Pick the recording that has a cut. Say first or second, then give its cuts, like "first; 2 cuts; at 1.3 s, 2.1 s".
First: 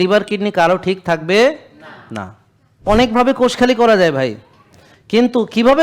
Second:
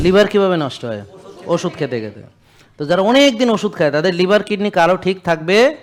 first; 1 cut; at 2.8 s